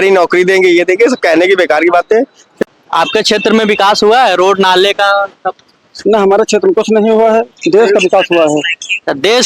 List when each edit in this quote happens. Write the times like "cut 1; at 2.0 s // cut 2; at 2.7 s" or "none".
cut 1; at 2.4 s